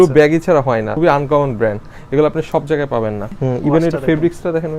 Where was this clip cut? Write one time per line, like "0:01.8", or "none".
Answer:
0:00.9
0:03.3